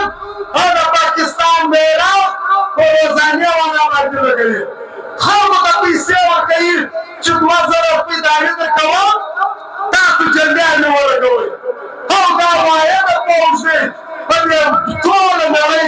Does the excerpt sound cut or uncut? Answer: uncut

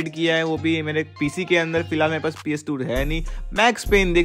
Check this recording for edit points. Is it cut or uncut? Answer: uncut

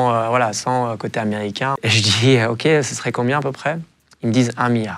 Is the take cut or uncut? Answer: cut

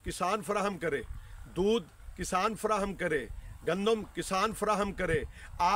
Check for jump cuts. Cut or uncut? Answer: uncut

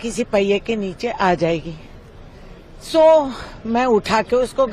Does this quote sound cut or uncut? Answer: uncut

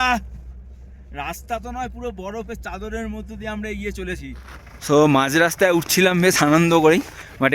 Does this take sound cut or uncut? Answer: cut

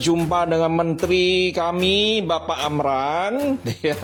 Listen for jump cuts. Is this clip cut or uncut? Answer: uncut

